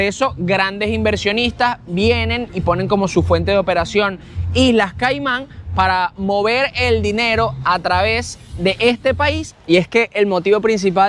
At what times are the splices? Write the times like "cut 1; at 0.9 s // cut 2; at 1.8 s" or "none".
cut 1; at 9.5 s